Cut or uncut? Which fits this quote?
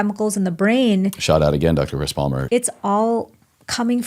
cut